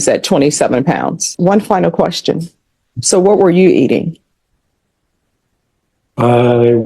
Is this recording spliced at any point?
yes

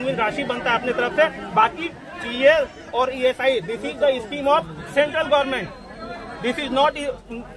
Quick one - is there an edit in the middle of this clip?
no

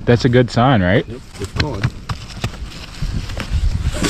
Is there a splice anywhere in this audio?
no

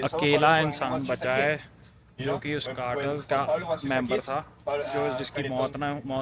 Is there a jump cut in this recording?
no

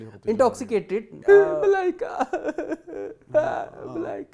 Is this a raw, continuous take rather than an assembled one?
no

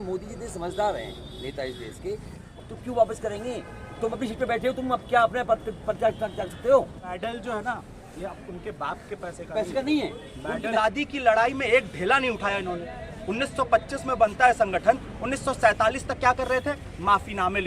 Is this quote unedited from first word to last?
no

